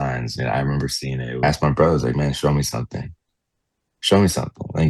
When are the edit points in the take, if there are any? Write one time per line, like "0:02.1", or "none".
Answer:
0:01.4